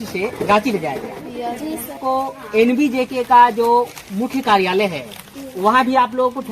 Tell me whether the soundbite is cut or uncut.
cut